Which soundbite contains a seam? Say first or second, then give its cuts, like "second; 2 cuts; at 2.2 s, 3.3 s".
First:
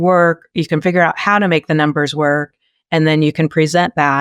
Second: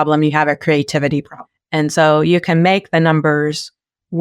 second; 1 cut; at 1.4 s